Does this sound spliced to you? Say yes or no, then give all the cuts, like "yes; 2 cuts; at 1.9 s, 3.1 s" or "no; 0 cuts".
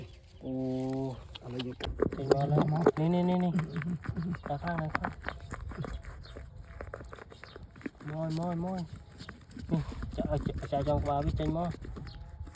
yes; 1 cut; at 1.8 s